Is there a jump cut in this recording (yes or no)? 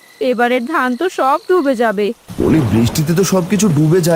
yes